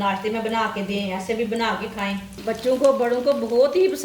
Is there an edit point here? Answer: yes; 1 cut; at 2.3 s

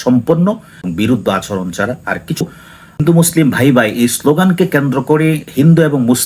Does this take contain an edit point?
yes; 1 cut; at 2.4 s

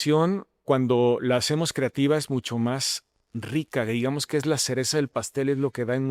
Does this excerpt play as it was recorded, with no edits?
yes; 0 cuts

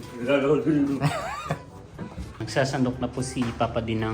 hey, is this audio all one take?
no; 1 cut; at 2.4 s

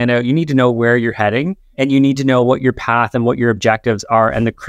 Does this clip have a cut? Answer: yes; 1 cut; at 1.6 s

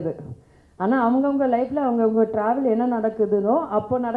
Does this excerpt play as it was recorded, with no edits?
yes; 0 cuts

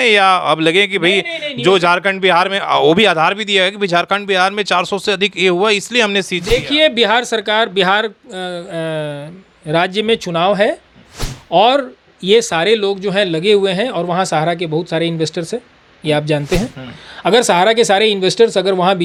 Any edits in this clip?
no; 0 cuts

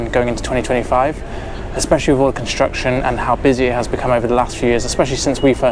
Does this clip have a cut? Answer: no; 0 cuts

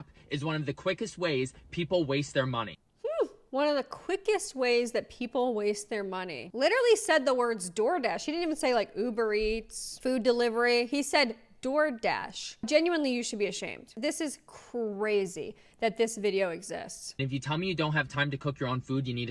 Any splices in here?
no; 0 cuts

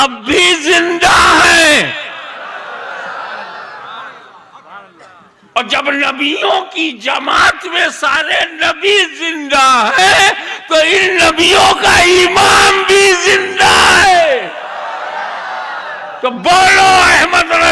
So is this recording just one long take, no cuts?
yes; 0 cuts

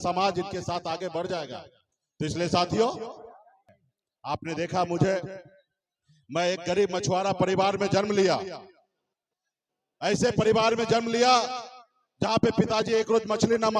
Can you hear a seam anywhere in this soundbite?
yes; 1 cut; at 3.6 s

